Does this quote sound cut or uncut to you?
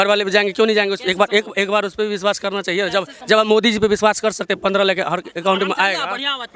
uncut